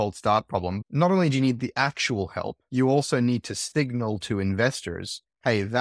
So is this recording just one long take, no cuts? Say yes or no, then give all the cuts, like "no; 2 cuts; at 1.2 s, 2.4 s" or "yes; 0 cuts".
no; 2 cuts; at 0.8 s, 3.6 s